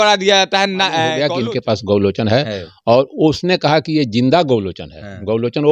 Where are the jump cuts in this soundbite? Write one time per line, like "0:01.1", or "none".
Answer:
0:01.2